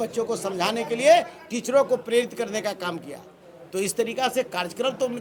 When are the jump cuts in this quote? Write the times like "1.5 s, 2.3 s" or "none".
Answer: none